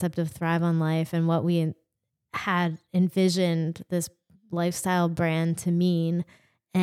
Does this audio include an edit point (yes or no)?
no